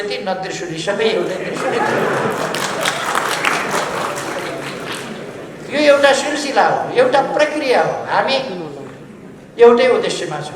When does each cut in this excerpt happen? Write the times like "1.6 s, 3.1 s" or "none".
none